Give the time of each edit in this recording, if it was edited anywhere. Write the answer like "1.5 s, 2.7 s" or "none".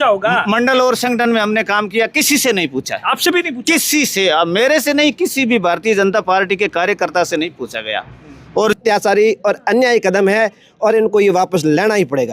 8.7 s